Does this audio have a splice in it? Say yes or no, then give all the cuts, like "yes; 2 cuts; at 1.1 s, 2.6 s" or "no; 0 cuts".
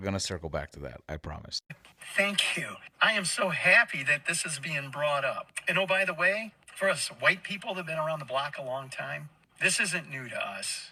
no; 0 cuts